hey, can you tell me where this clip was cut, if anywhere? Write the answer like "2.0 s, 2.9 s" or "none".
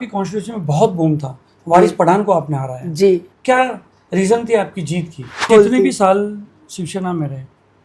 3.3 s, 5.5 s